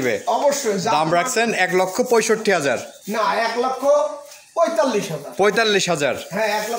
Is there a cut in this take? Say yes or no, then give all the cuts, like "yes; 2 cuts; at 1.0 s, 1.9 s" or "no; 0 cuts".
no; 0 cuts